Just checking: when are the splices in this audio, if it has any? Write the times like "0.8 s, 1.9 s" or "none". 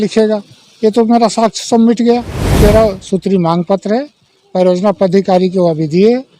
2.5 s